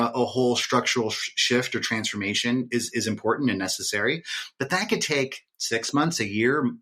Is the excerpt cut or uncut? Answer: uncut